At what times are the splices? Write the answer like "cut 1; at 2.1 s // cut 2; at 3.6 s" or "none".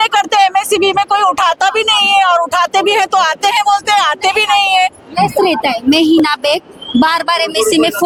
none